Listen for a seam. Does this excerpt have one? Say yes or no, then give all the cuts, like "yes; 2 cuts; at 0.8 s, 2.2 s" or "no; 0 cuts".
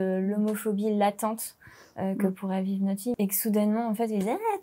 yes; 1 cut; at 3.2 s